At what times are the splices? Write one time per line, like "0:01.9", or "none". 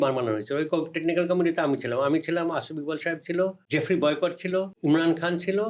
0:03.6
0:04.7